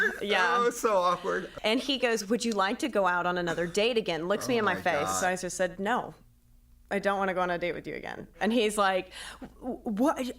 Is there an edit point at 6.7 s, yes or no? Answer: no